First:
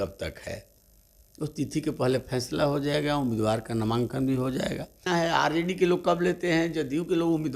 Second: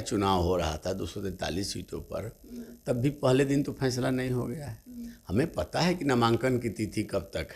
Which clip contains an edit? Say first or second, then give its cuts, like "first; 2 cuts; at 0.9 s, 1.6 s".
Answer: first; 1 cut; at 5.1 s